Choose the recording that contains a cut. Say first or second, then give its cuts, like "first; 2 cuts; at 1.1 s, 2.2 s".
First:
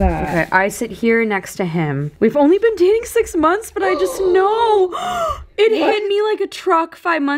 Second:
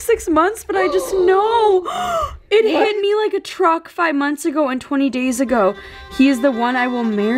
first; 1 cut; at 2.1 s